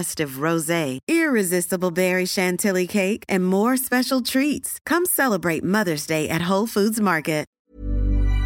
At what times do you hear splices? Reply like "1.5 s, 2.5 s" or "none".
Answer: 7.5 s